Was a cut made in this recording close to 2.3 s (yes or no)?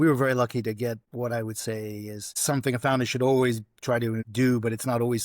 yes